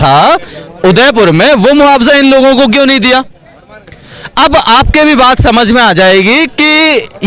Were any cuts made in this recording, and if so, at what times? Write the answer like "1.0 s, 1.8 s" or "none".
none